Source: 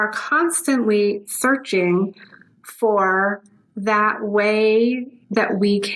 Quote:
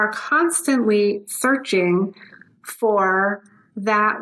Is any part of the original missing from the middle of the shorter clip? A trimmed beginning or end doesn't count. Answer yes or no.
no